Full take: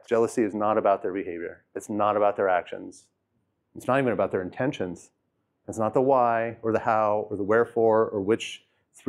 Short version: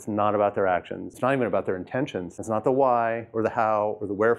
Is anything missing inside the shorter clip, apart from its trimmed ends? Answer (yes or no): yes